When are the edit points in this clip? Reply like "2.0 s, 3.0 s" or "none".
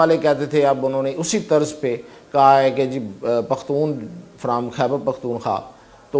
none